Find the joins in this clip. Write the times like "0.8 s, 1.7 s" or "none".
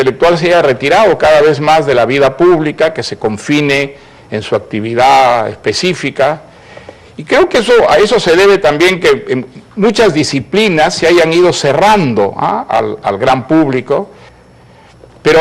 14.1 s